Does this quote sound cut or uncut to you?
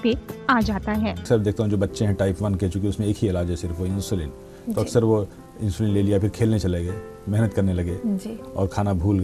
cut